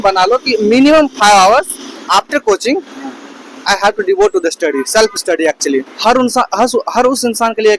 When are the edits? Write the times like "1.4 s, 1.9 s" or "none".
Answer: 5.9 s